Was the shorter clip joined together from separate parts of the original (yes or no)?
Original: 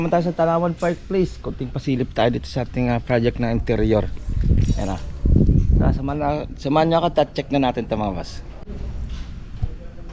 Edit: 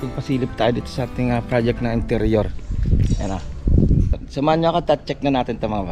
yes